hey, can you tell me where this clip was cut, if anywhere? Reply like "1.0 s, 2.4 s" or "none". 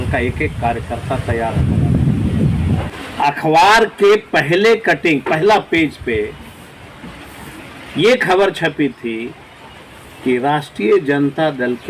2.9 s